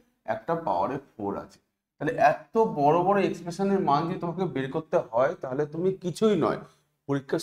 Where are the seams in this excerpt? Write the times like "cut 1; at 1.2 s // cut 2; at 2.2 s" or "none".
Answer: none